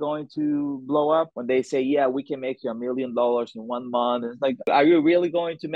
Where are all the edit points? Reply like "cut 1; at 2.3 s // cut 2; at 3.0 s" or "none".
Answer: cut 1; at 1.4 s // cut 2; at 4.7 s